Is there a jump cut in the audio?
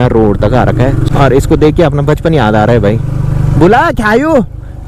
yes; 1 cut; at 1.1 s

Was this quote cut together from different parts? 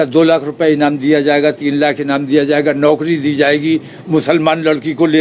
no; 0 cuts

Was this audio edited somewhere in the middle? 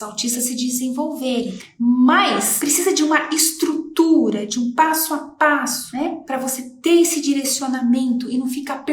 yes; 1 cut; at 2.5 s

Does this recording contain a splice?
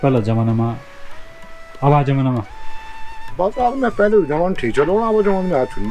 no; 0 cuts

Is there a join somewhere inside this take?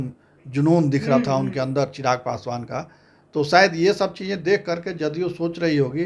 no; 0 cuts

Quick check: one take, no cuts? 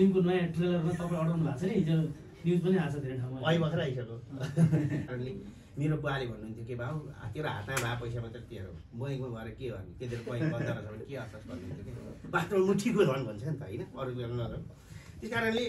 no; 1 cut; at 5.1 s

